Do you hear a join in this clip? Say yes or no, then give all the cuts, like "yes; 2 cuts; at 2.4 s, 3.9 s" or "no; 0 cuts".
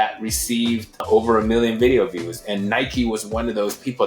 yes; 1 cut; at 1.0 s